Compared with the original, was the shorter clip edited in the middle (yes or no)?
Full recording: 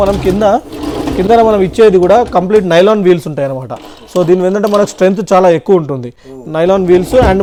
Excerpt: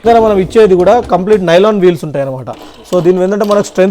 no